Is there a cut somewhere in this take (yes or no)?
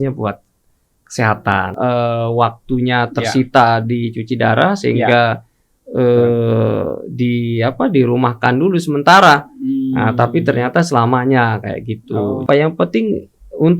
yes